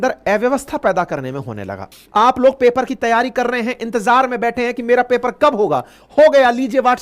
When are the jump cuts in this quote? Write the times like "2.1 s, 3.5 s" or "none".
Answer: 1.8 s